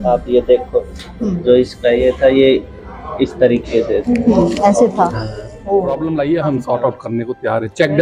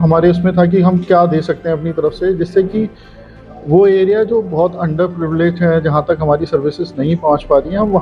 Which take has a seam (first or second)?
first